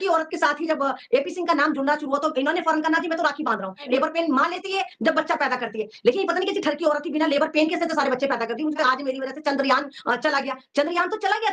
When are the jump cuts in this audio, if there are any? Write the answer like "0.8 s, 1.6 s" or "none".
3.8 s, 8.8 s